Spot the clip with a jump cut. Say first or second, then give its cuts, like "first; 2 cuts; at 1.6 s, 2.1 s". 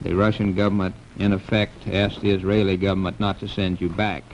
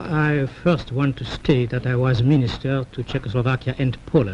first; 1 cut; at 1.5 s